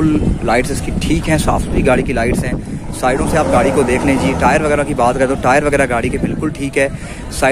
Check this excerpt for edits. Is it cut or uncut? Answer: uncut